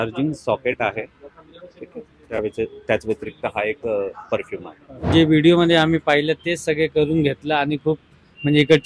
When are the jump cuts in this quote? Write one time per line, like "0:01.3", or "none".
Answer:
0:05.1